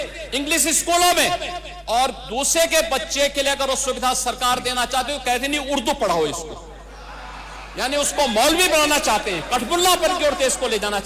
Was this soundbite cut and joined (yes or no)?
no